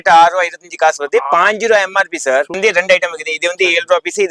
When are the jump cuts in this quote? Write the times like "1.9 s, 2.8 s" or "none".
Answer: 2.6 s